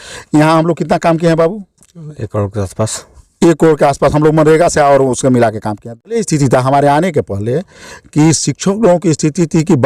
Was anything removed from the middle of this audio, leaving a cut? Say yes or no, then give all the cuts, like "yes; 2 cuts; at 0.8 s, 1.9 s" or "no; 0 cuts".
yes; 1 cut; at 6.2 s